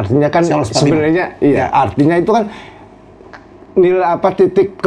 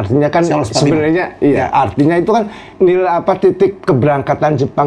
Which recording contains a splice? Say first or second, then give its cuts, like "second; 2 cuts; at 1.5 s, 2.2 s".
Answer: second; 1 cut; at 2.6 s